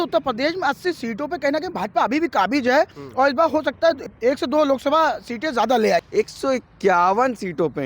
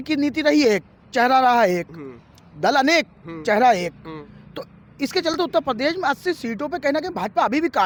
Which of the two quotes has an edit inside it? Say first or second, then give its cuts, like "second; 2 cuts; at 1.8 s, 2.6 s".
first; 2 cuts; at 4.1 s, 6.1 s